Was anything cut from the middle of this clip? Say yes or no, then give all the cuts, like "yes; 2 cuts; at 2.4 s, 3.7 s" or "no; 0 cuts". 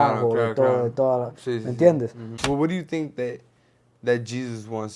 yes; 1 cut; at 2.3 s